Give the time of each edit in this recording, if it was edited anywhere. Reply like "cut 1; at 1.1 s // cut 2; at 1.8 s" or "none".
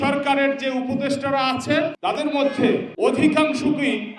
cut 1; at 2.9 s